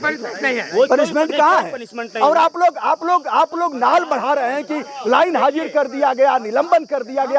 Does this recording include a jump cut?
no; 0 cuts

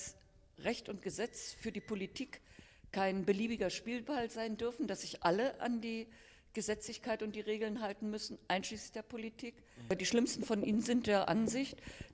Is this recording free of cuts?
no; 1 cut; at 9.9 s

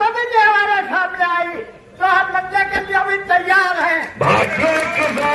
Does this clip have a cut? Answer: no; 0 cuts

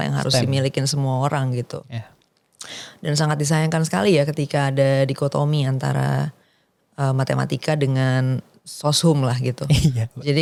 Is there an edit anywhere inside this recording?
no; 0 cuts

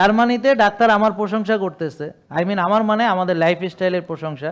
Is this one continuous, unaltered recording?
yes; 0 cuts

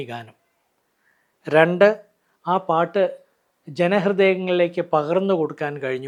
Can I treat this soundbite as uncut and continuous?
yes; 0 cuts

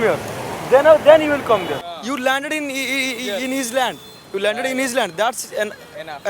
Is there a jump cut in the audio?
yes; 1 cut; at 1.9 s

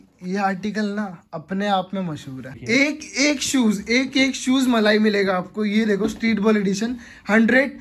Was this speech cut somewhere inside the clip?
yes; 1 cut; at 2.5 s

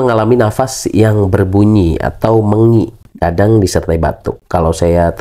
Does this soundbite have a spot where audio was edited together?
no; 0 cuts

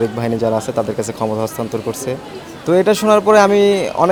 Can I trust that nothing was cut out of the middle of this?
yes; 0 cuts

